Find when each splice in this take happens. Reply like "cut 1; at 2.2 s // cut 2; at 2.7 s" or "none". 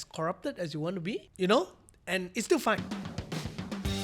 cut 1; at 1.3 s // cut 2; at 2.8 s

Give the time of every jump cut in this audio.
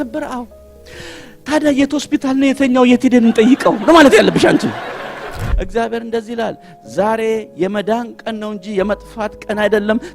cut 1; at 5.4 s

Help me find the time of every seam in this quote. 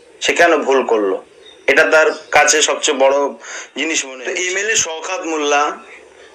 cut 1; at 4.0 s

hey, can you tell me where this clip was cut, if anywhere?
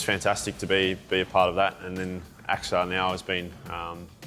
none

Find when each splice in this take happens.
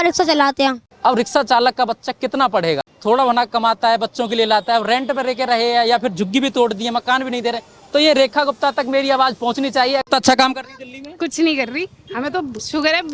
cut 1; at 0.9 s // cut 2; at 2.9 s // cut 3; at 10.1 s

